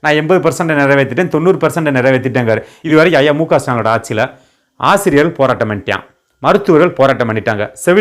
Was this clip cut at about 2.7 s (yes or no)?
yes